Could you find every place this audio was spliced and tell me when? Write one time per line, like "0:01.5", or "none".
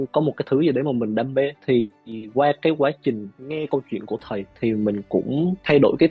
none